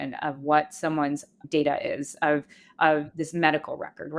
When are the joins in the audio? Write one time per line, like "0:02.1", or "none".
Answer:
0:01.4